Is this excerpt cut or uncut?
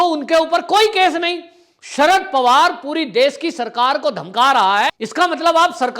cut